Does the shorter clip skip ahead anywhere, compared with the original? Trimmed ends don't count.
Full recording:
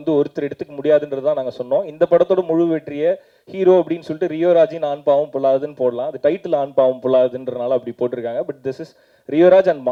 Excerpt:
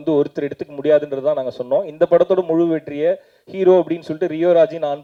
no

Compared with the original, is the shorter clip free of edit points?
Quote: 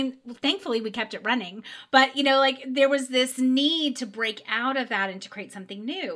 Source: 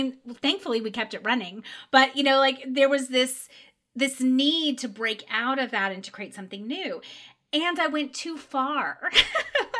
no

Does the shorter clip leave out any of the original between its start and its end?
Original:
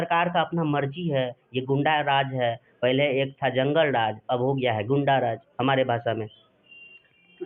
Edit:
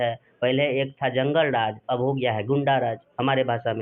no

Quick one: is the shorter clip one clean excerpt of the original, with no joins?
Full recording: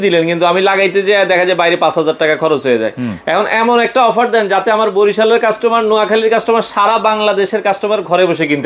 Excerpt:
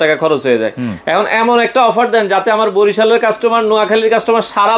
yes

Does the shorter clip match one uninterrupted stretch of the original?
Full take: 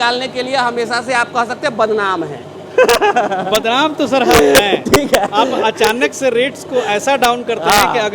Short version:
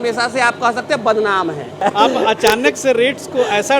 no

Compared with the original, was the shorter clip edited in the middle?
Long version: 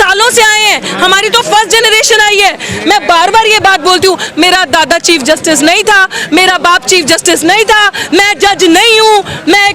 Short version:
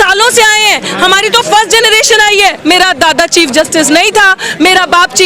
yes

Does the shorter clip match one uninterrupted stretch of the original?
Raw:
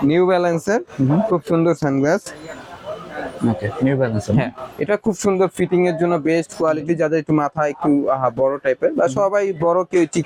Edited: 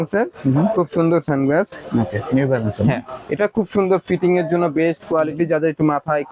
no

